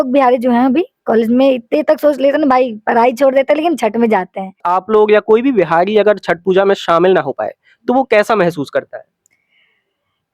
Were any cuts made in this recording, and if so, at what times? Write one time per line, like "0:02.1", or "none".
0:04.7